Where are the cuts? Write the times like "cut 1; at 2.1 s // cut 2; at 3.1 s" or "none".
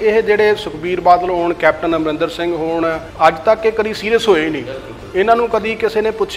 cut 1; at 3.0 s